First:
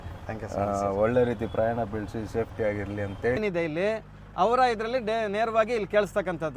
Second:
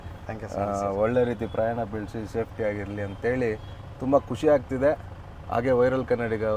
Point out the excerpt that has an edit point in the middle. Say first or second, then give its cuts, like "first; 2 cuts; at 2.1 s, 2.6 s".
first; 1 cut; at 3.4 s